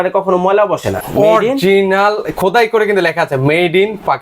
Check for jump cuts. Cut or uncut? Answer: cut